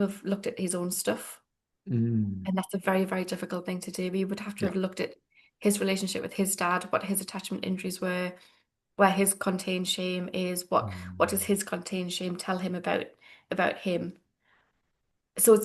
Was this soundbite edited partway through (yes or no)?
no